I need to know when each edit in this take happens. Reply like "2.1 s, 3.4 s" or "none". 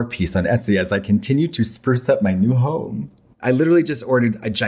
3.2 s

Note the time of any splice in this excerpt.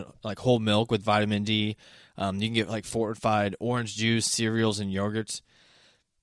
none

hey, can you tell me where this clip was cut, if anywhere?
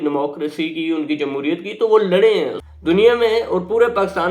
2.6 s

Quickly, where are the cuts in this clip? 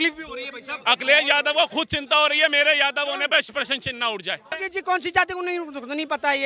4.6 s

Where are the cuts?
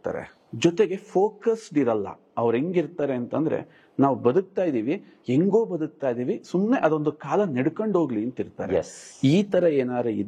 none

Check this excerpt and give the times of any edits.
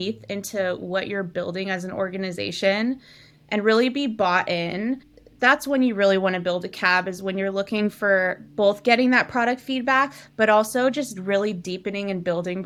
none

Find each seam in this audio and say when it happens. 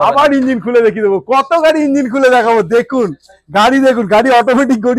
none

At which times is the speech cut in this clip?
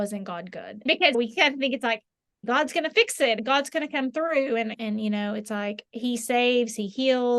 0.8 s, 2.4 s, 3.4 s, 4.7 s

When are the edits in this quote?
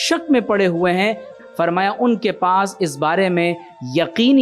1.4 s

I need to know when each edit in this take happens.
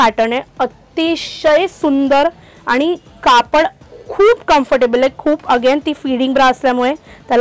none

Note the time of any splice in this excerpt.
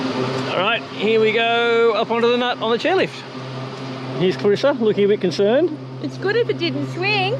none

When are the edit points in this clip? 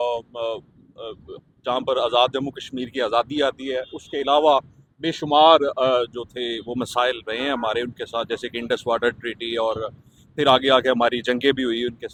none

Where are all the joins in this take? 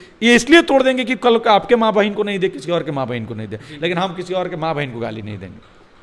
none

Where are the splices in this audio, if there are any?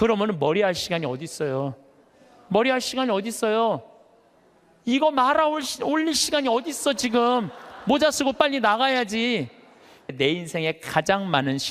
10.1 s

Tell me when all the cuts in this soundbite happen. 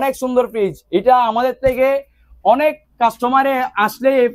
none

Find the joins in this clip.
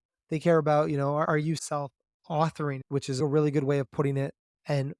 1.3 s, 3.2 s

